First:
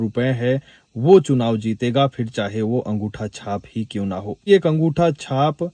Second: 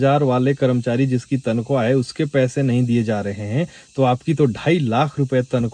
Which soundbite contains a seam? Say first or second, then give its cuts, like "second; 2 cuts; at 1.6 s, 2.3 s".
first; 1 cut; at 4.4 s